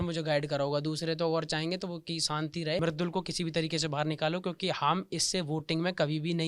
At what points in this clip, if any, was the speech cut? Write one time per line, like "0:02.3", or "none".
0:02.8

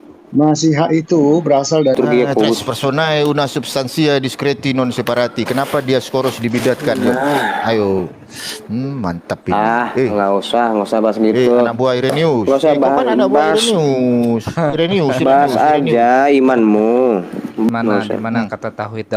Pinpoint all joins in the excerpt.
0:02.0
0:17.7

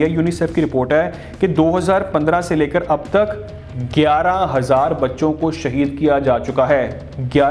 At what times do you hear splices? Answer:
none

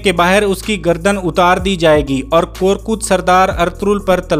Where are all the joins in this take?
none

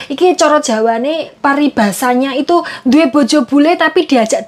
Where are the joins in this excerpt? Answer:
0:01.3
0:02.7

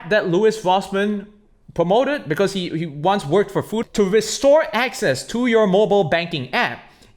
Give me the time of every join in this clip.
0:03.8

